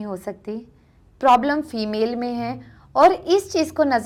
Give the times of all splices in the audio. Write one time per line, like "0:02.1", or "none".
none